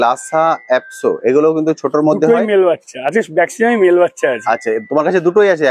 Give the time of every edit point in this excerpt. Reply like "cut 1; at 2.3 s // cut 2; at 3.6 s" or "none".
none